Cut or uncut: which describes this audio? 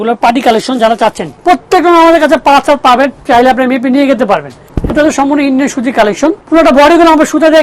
cut